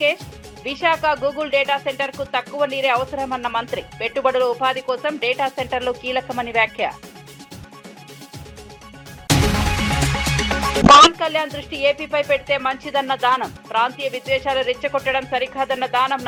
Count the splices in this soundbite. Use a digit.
0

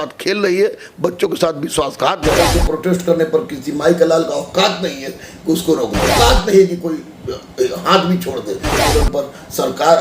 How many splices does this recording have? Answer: 3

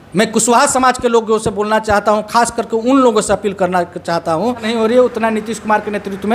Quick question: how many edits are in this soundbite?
1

